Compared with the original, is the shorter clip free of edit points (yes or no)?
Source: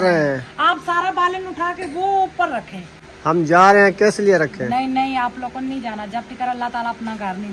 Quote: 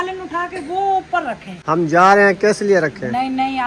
no